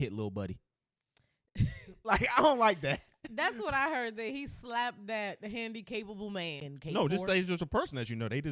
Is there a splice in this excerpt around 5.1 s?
no; 1 cut; at 6.6 s

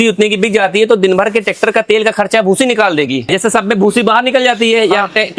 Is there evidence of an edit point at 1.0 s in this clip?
no; 1 cut; at 3.3 s

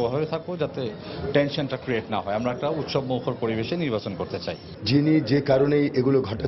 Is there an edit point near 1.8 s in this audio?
no; 1 cut; at 4.6 s

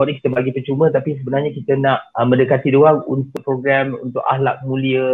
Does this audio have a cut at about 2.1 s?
yes; 2 cuts; at 2.1 s, 3.3 s

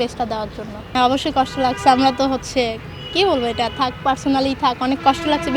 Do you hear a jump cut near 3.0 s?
no; 1 cut; at 0.9 s

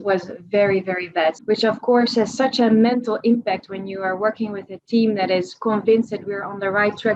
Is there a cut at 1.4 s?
yes; 1 cut; at 1.4 s

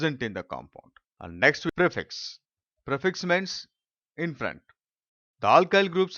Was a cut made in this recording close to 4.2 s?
no; 1 cut; at 1.3 s

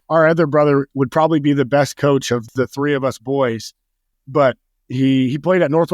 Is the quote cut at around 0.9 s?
yes; 3 cuts; at 0.9 s, 2.5 s, 4.1 s

